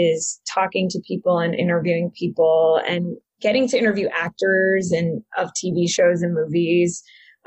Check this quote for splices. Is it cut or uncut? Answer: uncut